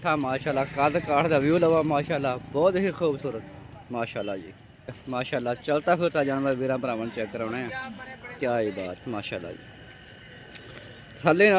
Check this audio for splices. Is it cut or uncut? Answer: cut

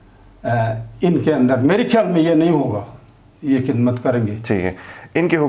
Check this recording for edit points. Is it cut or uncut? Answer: uncut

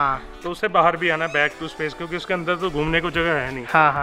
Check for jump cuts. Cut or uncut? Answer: uncut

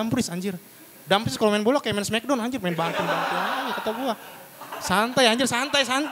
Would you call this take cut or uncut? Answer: uncut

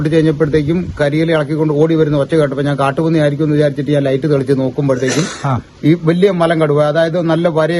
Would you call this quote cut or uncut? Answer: uncut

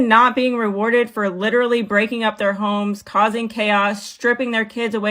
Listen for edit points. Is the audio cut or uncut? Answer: uncut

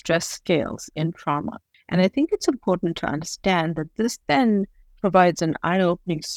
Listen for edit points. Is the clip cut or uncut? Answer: uncut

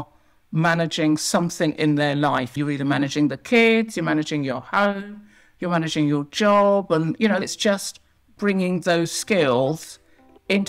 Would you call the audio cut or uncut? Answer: cut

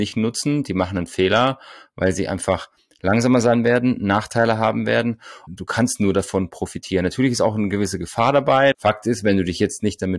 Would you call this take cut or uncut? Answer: cut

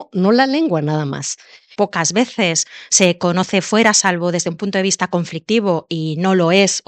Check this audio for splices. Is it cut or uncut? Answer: cut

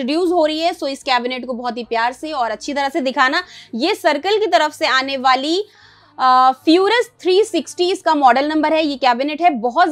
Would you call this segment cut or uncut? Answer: uncut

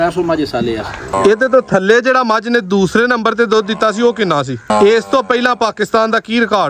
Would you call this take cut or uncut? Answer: cut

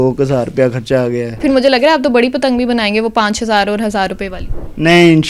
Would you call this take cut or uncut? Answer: cut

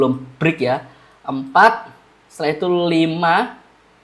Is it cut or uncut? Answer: uncut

